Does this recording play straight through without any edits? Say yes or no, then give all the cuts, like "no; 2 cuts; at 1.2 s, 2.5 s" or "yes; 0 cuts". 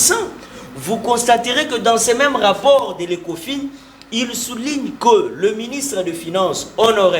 yes; 0 cuts